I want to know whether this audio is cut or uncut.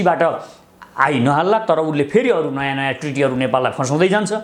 uncut